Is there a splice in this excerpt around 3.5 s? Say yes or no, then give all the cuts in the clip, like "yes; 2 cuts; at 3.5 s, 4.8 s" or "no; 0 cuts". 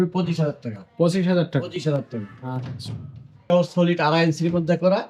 yes; 1 cut; at 3.5 s